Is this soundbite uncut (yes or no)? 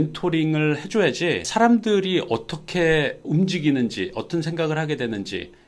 yes